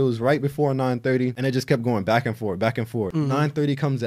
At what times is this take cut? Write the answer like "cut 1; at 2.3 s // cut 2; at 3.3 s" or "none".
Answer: cut 1; at 1.4 s // cut 2; at 3.1 s